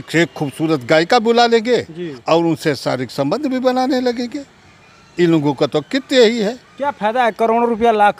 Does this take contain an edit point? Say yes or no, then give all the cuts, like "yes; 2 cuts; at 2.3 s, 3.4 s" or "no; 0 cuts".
no; 0 cuts